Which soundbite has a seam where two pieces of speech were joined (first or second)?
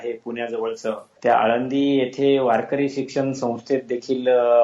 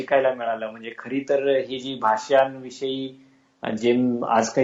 first